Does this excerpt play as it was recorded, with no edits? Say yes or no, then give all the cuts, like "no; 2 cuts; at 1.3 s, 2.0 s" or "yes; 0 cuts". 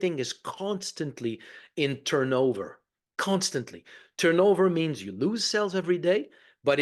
yes; 0 cuts